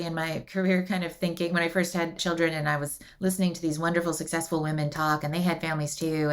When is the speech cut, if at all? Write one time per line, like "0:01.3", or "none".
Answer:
0:02.2